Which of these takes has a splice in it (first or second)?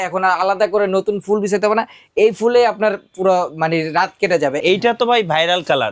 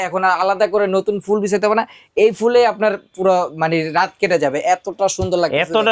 first